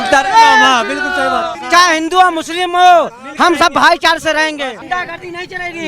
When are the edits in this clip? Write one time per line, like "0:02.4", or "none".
0:01.5
0:04.8